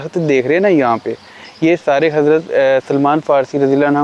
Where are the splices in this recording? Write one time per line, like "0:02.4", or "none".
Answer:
none